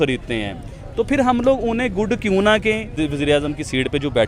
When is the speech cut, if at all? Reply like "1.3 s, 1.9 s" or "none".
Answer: 3.0 s